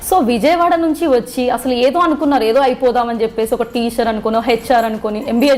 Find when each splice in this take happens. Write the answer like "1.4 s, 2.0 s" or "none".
none